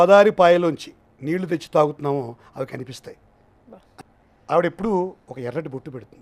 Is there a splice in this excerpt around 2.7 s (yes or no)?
no